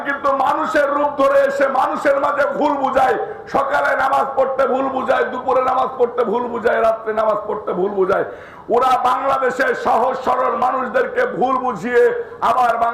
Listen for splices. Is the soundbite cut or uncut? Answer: uncut